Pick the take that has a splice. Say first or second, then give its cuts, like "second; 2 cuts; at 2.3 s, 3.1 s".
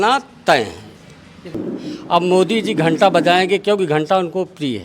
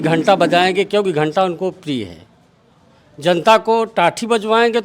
first; 1 cut; at 1.6 s